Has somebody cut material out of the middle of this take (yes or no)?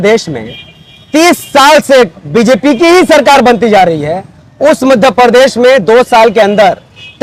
no